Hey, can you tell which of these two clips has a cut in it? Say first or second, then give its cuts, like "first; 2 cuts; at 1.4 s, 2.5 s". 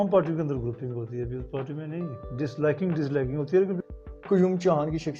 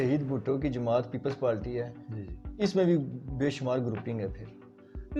first; 1 cut; at 3.8 s